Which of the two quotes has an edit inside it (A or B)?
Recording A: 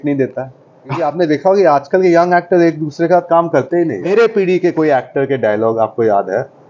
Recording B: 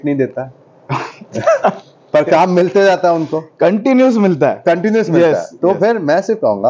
A